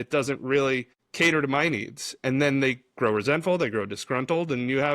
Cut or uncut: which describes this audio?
cut